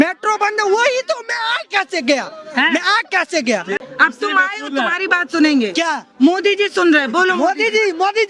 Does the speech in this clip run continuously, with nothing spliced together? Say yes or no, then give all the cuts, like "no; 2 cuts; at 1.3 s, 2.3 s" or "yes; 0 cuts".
no; 1 cut; at 3.8 s